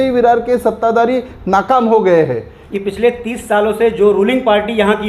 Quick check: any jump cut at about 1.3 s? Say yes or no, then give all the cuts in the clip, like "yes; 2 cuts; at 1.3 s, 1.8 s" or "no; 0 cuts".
no; 1 cut; at 2.5 s